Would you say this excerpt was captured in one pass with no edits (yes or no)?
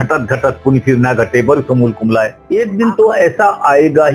no